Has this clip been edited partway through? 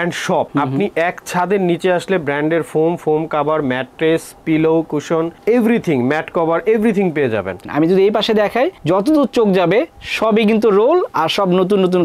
yes; 1 cut; at 7.7 s

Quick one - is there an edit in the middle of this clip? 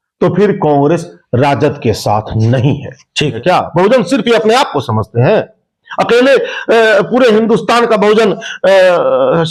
yes; 1 cut; at 3.3 s

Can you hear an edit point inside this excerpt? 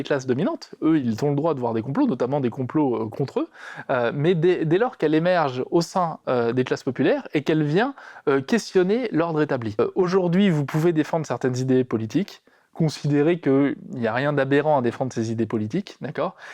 yes; 1 cut; at 9.8 s

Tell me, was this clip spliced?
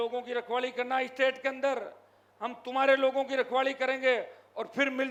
no; 0 cuts

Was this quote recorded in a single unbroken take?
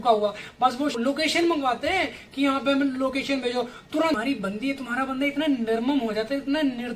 no; 2 cuts; at 0.9 s, 4.2 s

